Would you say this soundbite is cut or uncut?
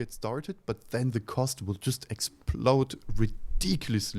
uncut